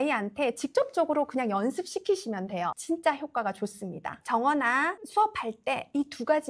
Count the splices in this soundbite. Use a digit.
2